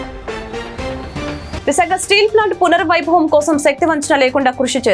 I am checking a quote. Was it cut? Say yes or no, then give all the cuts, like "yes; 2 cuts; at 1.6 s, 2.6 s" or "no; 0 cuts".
yes; 1 cut; at 1.1 s